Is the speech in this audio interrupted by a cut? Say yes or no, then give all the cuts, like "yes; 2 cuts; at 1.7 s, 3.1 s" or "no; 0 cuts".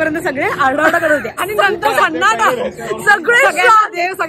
yes; 1 cut; at 1.4 s